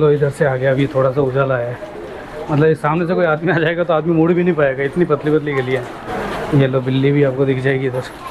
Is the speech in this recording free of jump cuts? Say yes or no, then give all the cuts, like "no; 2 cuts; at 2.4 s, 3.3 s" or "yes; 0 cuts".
yes; 0 cuts